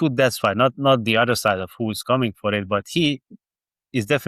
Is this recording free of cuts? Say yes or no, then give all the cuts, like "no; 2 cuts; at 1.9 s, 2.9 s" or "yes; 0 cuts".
yes; 0 cuts